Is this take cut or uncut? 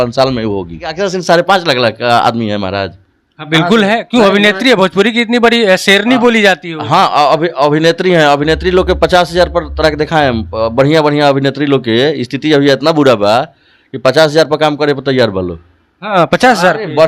cut